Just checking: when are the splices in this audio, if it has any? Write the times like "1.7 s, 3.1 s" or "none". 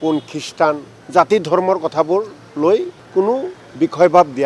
0.9 s, 3.0 s